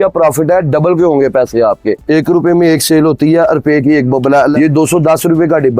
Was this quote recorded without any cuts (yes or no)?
no